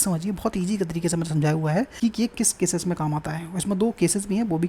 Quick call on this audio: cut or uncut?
cut